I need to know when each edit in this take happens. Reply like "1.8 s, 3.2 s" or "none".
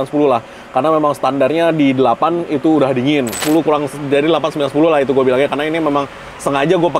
3.4 s